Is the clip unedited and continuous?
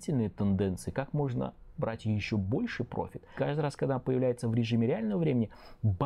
no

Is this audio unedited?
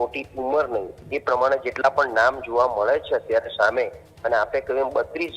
yes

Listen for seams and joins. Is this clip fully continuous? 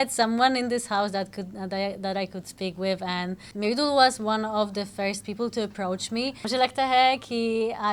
no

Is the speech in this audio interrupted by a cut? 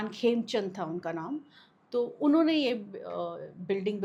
no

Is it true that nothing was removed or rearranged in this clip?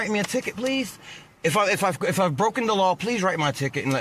yes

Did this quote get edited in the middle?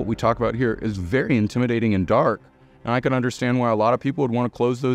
no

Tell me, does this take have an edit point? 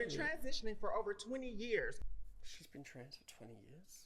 yes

